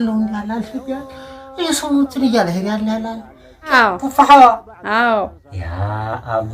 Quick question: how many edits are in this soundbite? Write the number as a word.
one